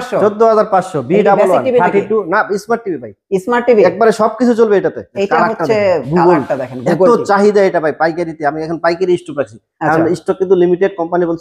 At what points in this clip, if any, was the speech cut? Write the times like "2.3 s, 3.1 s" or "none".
5.1 s